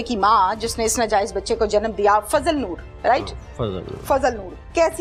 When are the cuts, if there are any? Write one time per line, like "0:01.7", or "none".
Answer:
none